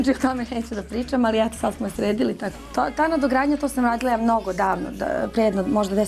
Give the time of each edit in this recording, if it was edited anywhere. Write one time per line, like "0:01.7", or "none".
none